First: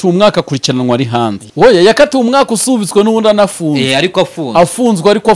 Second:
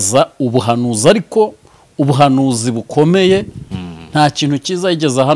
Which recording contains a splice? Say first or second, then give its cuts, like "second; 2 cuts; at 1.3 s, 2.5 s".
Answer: first; 1 cut; at 1.4 s